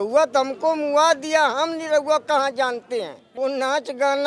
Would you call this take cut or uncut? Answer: cut